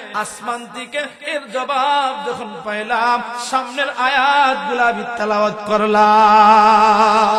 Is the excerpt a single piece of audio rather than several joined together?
yes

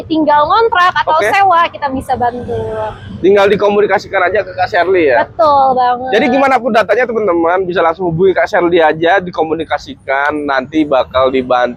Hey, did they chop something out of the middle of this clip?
no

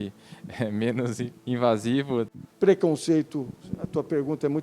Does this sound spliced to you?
yes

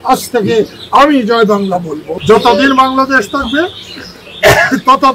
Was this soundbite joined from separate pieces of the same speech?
yes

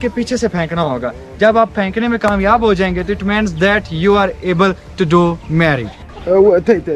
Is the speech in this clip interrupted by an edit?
no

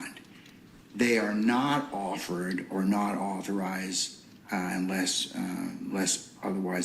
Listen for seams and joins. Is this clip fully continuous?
no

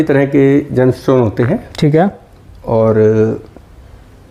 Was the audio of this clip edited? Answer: no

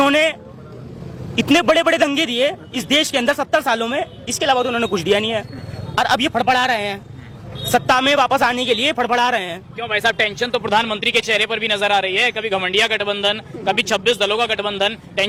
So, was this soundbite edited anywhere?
no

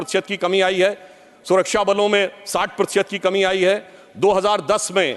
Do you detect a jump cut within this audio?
no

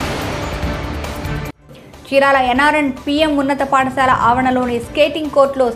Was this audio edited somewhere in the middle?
yes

